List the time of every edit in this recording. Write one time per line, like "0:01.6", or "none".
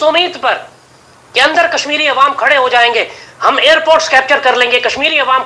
none